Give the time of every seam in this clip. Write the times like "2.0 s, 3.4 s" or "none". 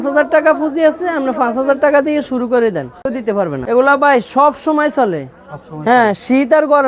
3.2 s